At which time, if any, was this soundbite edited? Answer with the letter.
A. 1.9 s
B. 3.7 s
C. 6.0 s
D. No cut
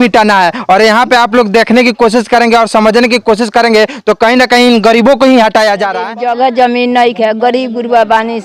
C